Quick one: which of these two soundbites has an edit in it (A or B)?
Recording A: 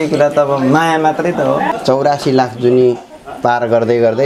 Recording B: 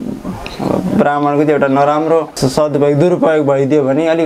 A